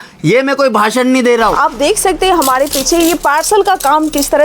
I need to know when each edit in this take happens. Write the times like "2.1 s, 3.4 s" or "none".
1.6 s